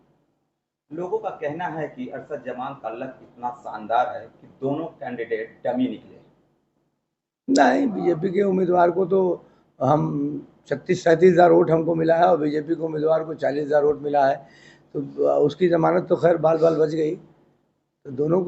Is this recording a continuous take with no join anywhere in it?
yes; 0 cuts

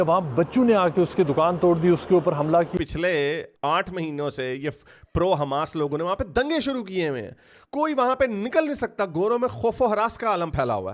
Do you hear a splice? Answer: yes; 1 cut; at 2.7 s

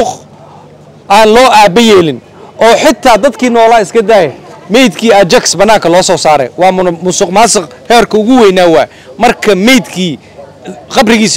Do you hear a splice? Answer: no; 0 cuts

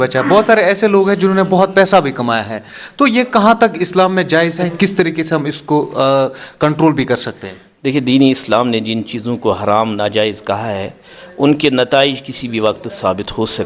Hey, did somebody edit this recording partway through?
no; 0 cuts

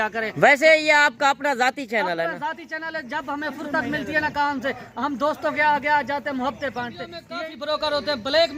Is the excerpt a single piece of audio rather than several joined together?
no; 1 cut; at 7.2 s

